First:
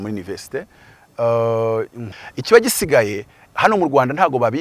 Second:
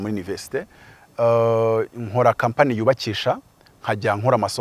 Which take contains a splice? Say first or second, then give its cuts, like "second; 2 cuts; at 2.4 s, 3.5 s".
first; 1 cut; at 2.0 s